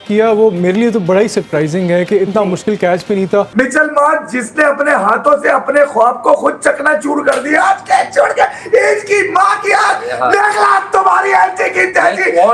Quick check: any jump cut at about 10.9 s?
no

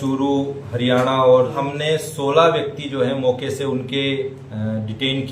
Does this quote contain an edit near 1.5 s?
yes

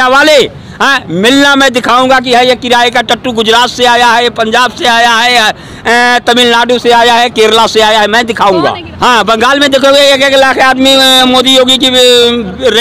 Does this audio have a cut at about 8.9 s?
yes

